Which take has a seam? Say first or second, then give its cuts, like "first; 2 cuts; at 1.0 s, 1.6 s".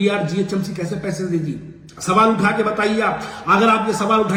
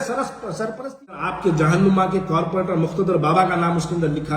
second; 1 cut; at 1.2 s